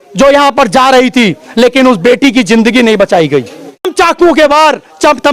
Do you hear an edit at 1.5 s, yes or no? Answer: no